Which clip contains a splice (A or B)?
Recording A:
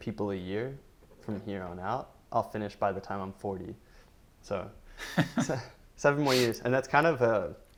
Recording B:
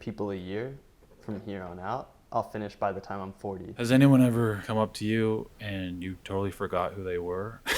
B